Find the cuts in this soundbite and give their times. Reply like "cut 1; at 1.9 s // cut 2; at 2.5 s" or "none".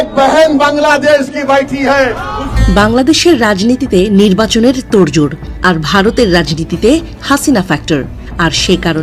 cut 1; at 2.5 s // cut 2; at 8.2 s